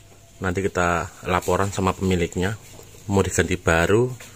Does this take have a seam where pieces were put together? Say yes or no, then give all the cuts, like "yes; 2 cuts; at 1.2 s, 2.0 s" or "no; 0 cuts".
no; 0 cuts